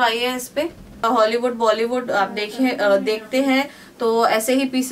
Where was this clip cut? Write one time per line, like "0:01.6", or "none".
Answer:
0:01.0